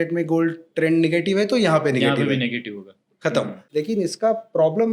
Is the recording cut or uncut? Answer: cut